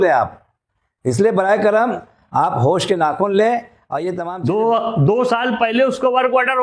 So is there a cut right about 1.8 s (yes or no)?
no